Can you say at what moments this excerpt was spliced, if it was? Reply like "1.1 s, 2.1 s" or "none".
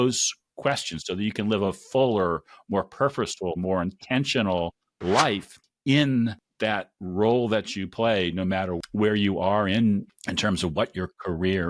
8.7 s